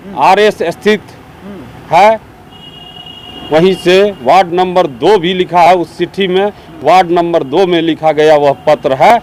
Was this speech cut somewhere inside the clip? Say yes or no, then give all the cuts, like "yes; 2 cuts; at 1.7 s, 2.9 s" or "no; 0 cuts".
no; 0 cuts